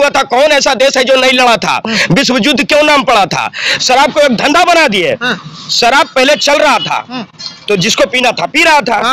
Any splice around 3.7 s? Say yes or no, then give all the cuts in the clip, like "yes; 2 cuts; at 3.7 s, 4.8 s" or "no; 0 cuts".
yes; 1 cut; at 3.7 s